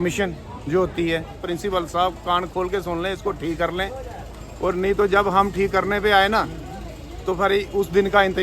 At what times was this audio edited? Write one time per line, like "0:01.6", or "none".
0:01.4